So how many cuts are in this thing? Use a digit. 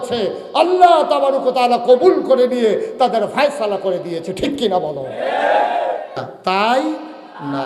1